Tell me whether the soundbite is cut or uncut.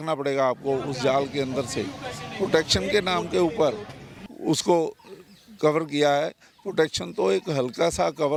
uncut